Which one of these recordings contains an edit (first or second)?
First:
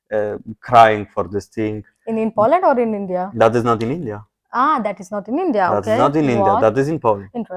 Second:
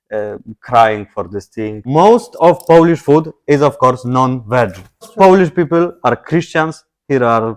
second